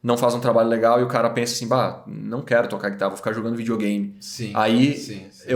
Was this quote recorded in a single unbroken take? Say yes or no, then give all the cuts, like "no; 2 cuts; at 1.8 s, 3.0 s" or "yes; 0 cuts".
yes; 0 cuts